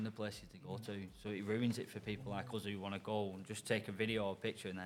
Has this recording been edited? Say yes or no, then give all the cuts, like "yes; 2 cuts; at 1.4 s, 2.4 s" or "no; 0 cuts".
no; 0 cuts